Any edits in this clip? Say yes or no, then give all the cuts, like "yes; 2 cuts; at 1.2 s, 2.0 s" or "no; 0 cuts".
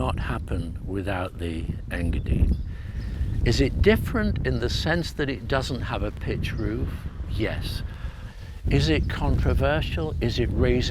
yes; 1 cut; at 8.3 s